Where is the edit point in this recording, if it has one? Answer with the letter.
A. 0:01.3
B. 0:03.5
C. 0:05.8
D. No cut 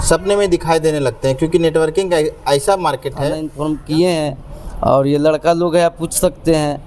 B